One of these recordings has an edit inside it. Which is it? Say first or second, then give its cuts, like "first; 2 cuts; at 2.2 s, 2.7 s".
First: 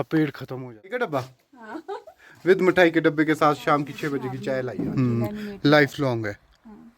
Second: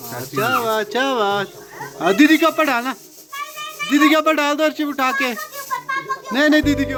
first; 2 cuts; at 1.0 s, 4.6 s